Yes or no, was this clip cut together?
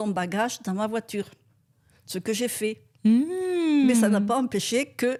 no